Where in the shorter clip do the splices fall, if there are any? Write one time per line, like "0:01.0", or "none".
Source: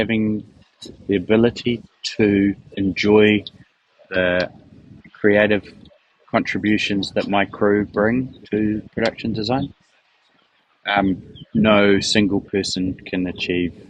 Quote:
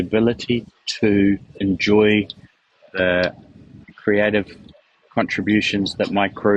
none